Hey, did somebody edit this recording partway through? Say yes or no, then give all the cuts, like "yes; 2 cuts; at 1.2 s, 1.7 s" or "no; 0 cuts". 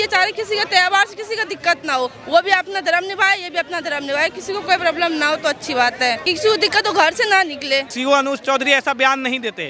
yes; 2 cuts; at 6.3 s, 7.9 s